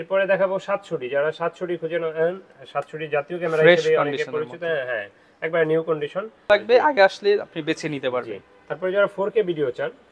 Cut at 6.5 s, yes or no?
yes